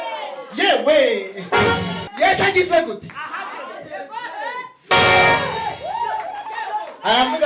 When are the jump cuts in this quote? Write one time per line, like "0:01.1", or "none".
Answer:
0:02.0